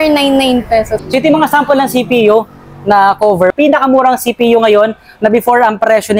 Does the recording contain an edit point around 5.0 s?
no; 2 cuts; at 1.0 s, 3.5 s

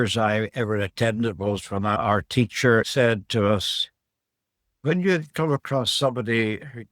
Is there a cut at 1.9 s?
yes; 2 cuts; at 1.9 s, 2.9 s

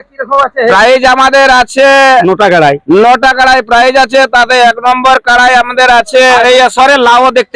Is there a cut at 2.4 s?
no; 1 cut; at 6.4 s

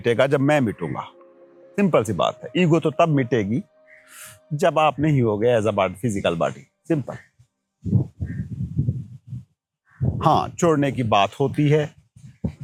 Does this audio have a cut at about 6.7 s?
no; 0 cuts

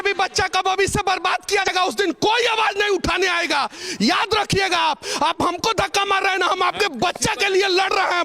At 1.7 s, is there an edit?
yes; 1 cut; at 1.7 s

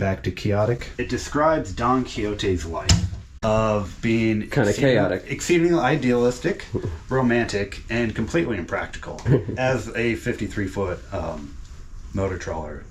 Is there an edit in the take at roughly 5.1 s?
no; 3 cuts; at 0.9 s, 3.2 s, 9.3 s

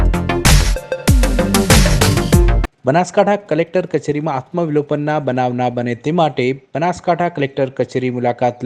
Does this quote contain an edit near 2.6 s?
yes; 1 cut; at 2.6 s

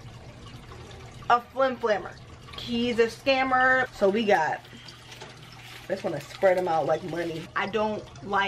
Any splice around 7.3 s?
yes; 2 cuts; at 3.9 s, 7.3 s

